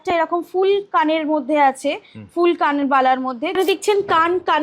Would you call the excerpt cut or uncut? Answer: cut